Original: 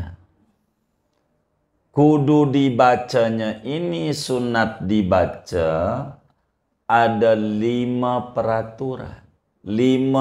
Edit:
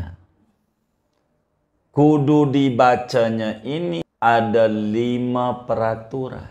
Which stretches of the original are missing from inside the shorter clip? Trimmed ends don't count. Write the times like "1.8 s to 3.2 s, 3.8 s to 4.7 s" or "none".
4.0 s to 6.7 s